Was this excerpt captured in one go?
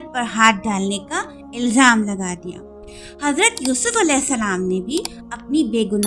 yes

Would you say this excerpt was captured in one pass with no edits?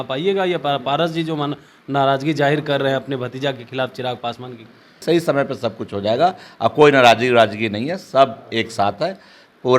no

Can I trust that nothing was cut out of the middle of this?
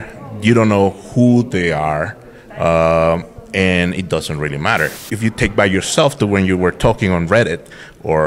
no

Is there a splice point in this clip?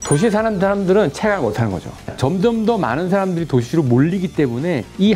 yes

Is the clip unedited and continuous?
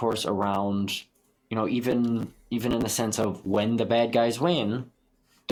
yes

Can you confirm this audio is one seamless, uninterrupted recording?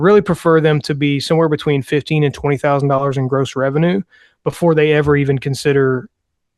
yes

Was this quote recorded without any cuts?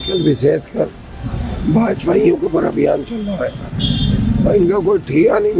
yes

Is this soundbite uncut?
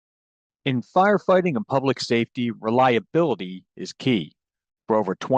yes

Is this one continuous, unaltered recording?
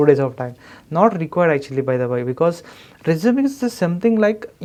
yes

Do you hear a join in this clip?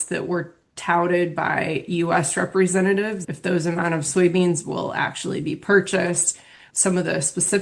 yes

